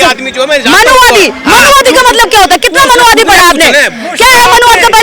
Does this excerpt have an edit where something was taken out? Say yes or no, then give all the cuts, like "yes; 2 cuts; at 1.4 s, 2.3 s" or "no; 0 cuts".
no; 0 cuts